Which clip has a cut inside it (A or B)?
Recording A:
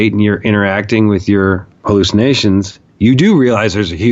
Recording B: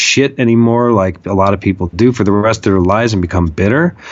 A